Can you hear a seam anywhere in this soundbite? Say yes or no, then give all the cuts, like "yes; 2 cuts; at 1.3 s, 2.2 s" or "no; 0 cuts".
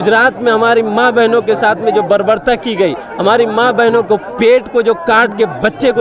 no; 0 cuts